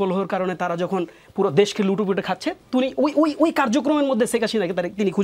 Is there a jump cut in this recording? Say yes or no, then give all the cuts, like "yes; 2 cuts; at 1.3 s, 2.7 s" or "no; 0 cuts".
no; 0 cuts